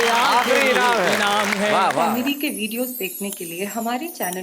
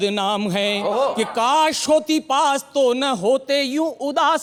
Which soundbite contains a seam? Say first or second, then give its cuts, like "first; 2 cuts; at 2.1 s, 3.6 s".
first; 1 cut; at 2.0 s